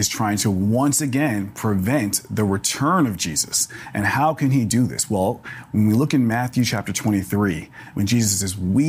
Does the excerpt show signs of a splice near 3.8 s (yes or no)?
yes